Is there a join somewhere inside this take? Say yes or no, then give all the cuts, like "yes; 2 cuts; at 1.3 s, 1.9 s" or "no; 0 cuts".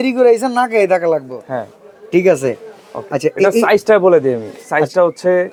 no; 0 cuts